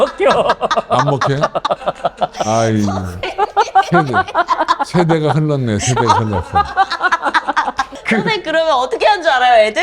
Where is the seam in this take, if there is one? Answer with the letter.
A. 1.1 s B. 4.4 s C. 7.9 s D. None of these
C